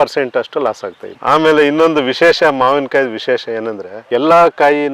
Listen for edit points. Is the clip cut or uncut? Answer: cut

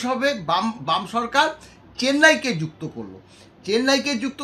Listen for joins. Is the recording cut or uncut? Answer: uncut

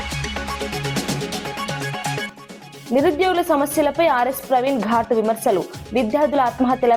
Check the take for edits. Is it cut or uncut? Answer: cut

